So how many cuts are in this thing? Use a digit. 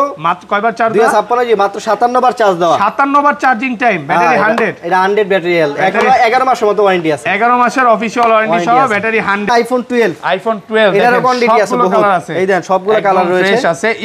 1